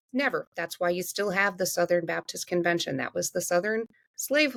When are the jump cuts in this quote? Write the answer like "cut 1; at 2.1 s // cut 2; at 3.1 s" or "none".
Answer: none